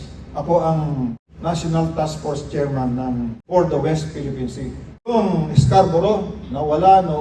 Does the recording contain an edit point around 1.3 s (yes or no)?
yes